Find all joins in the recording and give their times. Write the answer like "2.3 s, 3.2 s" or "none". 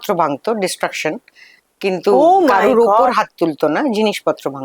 none